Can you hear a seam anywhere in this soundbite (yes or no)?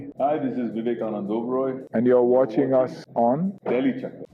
no